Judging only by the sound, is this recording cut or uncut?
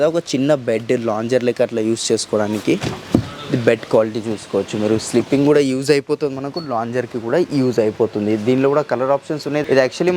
uncut